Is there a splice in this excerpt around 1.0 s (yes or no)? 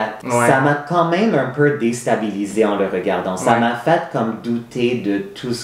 no